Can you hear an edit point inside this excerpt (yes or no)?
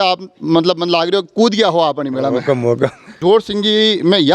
yes